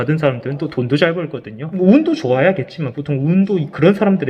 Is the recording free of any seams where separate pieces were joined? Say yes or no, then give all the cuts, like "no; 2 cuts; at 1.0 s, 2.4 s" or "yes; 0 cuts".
no; 1 cut; at 1.6 s